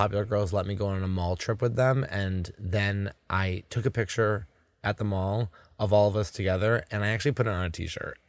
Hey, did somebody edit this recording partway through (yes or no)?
no